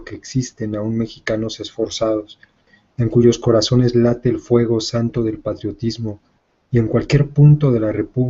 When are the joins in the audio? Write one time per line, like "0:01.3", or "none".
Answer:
none

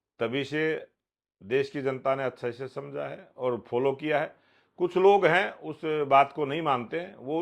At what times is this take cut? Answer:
none

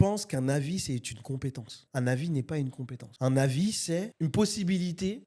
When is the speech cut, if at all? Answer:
none

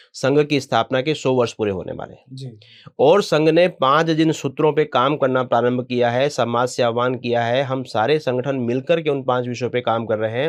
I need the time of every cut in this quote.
none

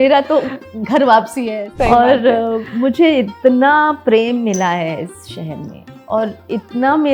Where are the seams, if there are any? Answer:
0:01.7

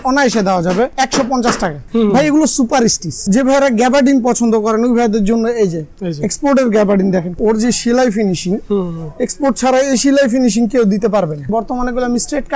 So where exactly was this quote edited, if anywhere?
0:00.9
0:01.8
0:03.2
0:07.3
0:11.4

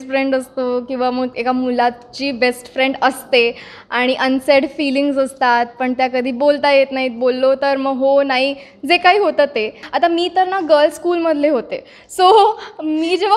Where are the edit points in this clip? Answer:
0:09.8

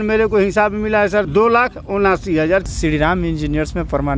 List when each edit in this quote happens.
0:02.7

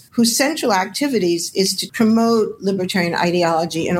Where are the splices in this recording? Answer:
0:01.8

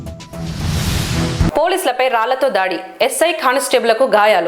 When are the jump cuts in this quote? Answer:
0:01.4

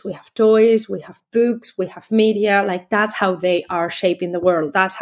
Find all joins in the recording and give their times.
none

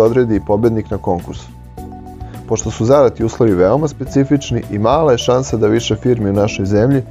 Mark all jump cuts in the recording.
none

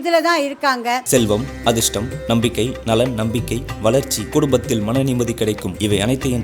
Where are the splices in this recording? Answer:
0:01.0

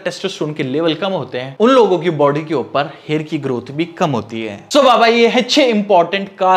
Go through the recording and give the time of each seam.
none

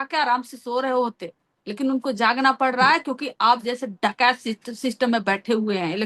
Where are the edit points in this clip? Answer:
none

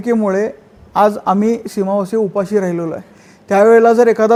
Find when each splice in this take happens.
none

